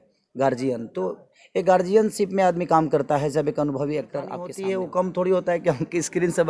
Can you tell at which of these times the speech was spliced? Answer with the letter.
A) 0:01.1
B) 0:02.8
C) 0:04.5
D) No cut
C